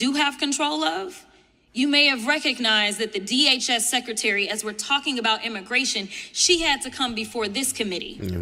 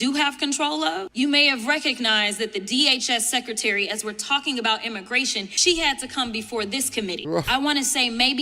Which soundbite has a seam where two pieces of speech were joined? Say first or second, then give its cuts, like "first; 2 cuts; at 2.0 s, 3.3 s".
second; 3 cuts; at 1.1 s, 5.5 s, 7.2 s